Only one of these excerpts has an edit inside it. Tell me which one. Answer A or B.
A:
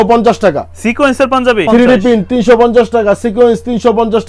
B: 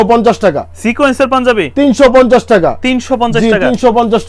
A